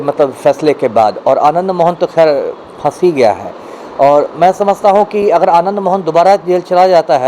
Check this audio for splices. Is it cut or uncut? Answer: uncut